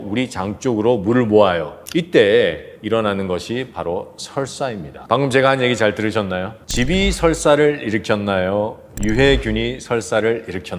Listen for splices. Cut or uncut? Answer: uncut